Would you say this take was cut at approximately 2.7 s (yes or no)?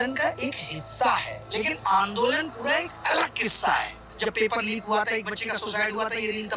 no